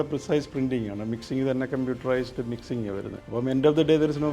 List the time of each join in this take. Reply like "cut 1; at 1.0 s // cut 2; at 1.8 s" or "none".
cut 1; at 3.2 s